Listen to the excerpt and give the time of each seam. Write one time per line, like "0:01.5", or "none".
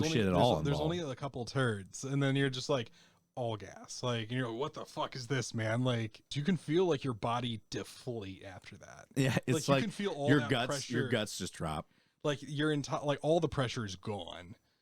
0:06.3